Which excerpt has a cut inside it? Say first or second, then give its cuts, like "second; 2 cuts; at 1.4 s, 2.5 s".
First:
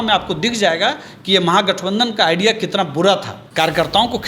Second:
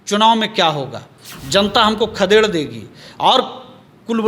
first; 1 cut; at 3.4 s